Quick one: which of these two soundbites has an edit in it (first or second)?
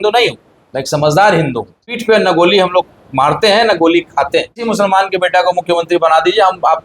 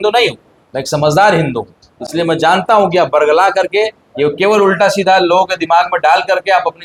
first